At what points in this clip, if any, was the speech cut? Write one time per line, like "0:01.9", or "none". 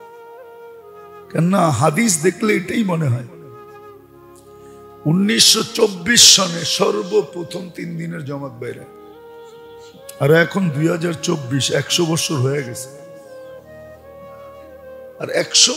0:03.2
0:05.0
0:08.8
0:10.2
0:13.0
0:15.0